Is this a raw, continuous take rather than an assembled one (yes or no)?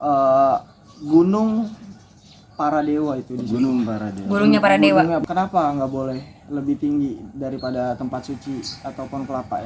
no